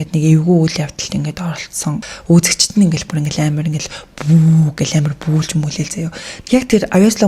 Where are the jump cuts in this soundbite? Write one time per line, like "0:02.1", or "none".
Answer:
0:02.1
0:06.3